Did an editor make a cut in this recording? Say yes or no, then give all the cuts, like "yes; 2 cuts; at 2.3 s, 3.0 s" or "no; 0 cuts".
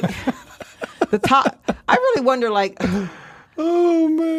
no; 0 cuts